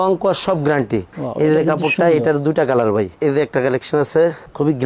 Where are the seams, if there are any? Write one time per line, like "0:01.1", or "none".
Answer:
0:01.1